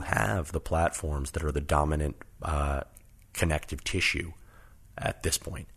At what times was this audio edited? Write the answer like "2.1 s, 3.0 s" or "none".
none